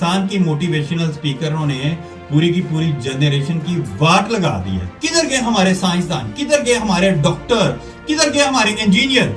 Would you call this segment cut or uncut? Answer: uncut